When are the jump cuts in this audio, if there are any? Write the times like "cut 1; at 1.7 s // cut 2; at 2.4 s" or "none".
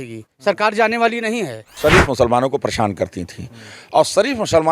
cut 1; at 1.8 s